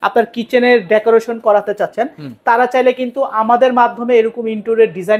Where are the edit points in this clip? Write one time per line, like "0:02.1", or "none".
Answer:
none